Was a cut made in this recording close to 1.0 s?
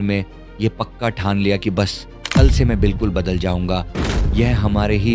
no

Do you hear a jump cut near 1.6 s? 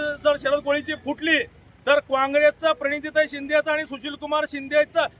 no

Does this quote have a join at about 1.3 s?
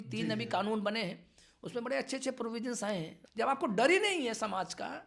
no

